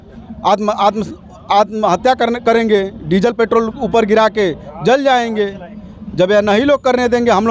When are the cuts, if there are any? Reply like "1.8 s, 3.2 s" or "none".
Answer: none